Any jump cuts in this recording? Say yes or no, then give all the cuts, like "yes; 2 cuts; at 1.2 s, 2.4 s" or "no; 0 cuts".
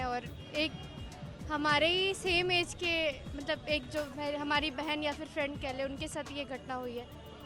no; 0 cuts